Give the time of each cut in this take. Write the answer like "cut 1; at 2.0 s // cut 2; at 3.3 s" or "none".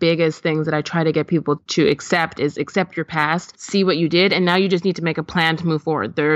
cut 1; at 1.6 s // cut 2; at 3.5 s